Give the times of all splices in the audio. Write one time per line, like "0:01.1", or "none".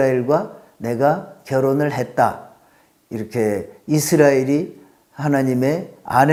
none

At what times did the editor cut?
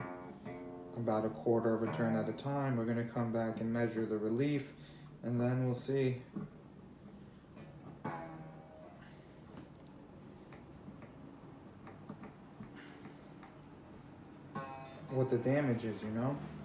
0:14.8

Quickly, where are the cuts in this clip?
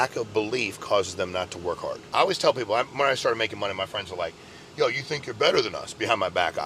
0:02.0

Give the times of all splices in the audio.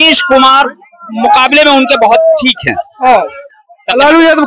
none

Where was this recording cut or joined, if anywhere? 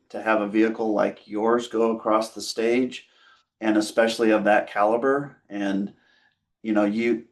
none

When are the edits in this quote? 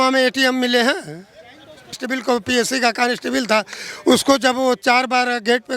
0:02.0

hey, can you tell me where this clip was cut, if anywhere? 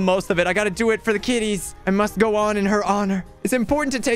0:01.7
0:03.3

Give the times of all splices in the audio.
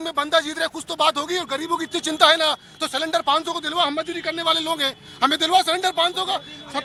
none

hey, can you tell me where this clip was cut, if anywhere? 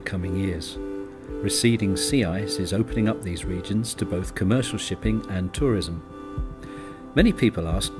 none

